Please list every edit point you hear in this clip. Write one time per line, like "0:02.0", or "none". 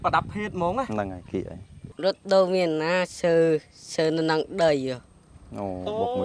0:01.8